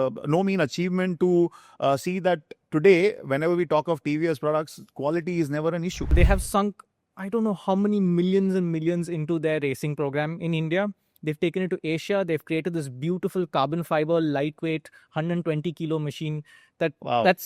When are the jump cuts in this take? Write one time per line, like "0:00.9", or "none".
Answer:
0:06.1